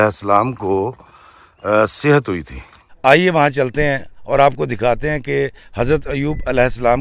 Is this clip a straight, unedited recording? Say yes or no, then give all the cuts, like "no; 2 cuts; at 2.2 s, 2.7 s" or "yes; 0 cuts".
no; 1 cut; at 2.8 s